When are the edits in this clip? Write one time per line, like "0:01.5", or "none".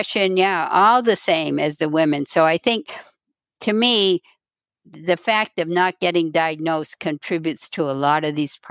none